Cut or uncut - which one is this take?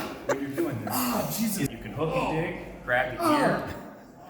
cut